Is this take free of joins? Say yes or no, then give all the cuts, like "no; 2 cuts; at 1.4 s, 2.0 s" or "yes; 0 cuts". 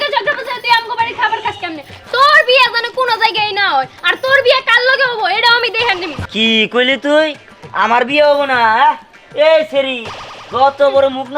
no; 1 cut; at 6.3 s